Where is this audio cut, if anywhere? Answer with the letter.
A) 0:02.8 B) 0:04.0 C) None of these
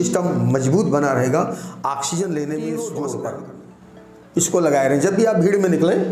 A